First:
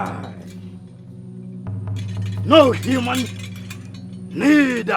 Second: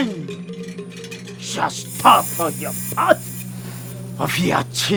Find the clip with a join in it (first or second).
first